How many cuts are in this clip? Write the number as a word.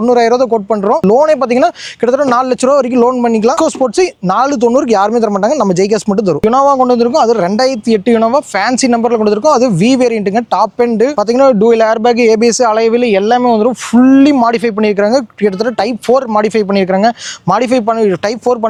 zero